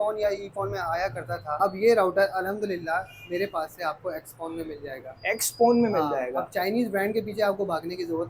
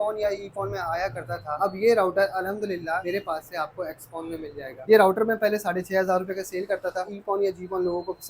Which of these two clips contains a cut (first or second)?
second